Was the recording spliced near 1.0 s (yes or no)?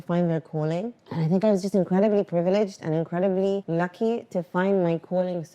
yes